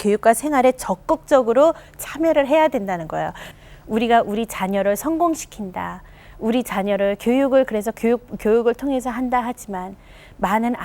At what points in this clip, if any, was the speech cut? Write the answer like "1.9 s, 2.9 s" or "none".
3.4 s